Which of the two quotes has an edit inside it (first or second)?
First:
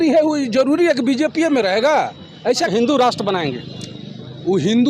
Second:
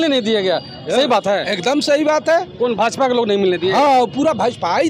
first